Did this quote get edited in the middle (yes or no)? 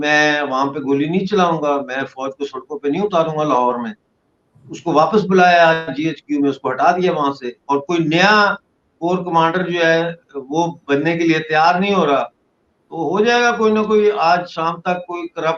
no